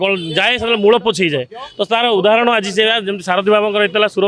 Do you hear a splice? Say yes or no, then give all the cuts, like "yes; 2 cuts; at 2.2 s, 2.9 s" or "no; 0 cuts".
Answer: no; 0 cuts